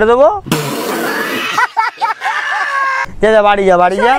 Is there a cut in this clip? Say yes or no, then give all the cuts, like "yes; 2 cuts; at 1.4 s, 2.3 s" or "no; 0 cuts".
yes; 1 cut; at 3.0 s